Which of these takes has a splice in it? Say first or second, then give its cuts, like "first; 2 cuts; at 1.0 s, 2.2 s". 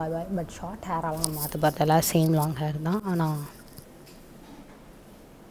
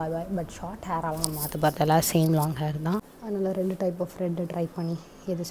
second; 1 cut; at 3.0 s